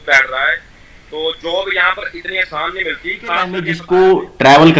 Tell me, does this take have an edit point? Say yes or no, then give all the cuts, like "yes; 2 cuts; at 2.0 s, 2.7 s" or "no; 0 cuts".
yes; 1 cut; at 3.7 s